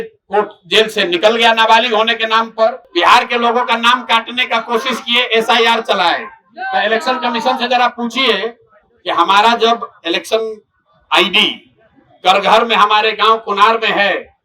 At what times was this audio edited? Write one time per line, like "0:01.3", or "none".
0:02.8

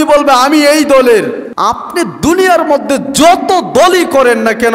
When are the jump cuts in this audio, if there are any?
0:01.5

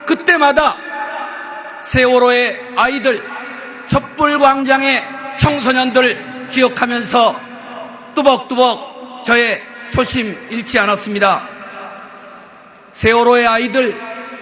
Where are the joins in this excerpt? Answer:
0:08.5

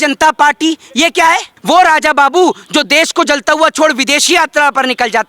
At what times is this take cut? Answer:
0:01.5

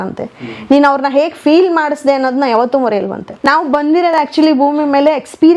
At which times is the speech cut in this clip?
0:03.3

